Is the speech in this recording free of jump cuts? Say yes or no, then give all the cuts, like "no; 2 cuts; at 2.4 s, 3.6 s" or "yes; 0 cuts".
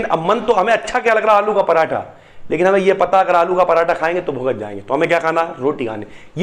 yes; 0 cuts